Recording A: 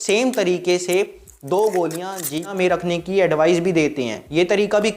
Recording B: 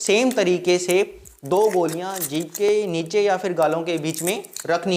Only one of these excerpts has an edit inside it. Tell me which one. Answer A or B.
A